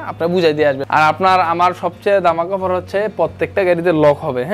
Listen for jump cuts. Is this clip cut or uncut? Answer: cut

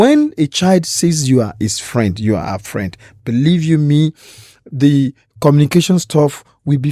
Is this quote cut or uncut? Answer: uncut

